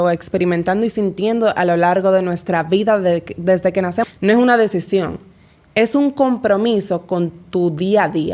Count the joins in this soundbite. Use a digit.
1